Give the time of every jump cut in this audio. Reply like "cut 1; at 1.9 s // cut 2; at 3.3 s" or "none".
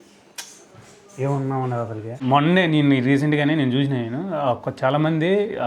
cut 1; at 2.0 s